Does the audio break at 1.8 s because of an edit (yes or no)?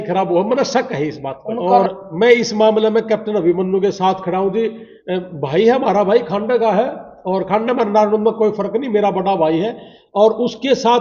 yes